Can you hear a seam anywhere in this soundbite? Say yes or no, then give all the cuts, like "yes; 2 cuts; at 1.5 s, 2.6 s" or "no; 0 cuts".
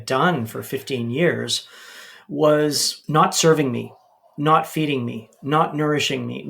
yes; 1 cut; at 2.9 s